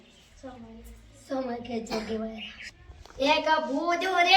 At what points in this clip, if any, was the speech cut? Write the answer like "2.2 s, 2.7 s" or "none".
2.5 s